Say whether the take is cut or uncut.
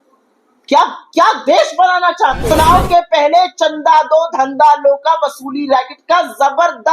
cut